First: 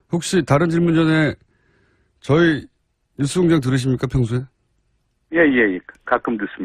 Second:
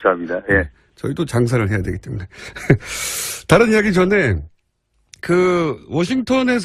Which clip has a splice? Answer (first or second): second